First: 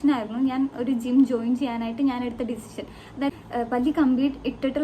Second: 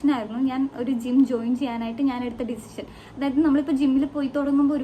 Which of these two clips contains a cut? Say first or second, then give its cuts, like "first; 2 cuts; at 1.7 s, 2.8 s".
first; 1 cut; at 3.3 s